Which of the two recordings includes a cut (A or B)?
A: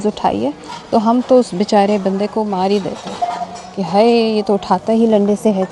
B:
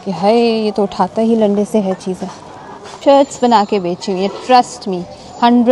B